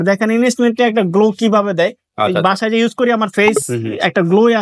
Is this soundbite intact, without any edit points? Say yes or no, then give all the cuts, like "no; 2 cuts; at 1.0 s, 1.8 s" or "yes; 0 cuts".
yes; 0 cuts